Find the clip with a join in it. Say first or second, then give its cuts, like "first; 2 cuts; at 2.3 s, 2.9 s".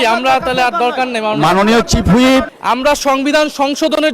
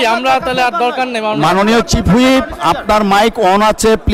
first; 1 cut; at 2.5 s